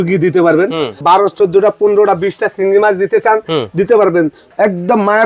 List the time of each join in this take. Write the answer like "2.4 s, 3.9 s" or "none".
1.0 s, 4.4 s